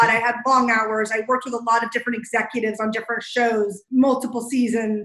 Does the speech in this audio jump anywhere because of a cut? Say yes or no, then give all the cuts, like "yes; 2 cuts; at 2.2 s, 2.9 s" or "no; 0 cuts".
yes; 1 cut; at 3.8 s